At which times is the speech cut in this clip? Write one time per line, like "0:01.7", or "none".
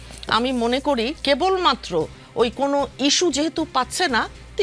0:01.2

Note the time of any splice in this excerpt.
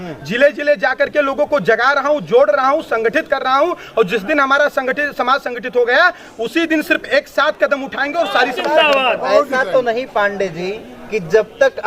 0:08.6

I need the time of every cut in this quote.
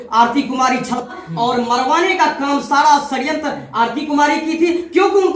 0:01.1

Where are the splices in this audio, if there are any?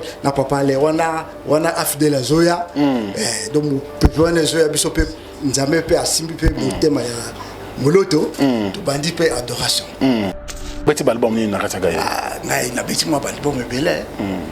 0:10.8

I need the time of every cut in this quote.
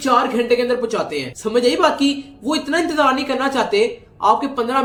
none

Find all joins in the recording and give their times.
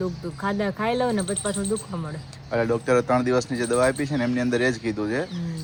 none

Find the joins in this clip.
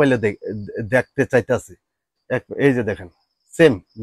0:02.2

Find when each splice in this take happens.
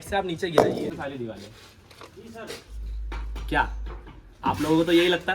0:00.9

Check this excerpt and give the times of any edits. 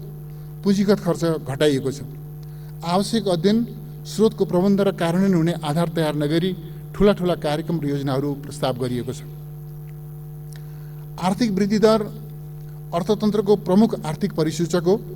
none

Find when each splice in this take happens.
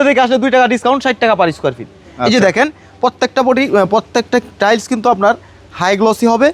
none

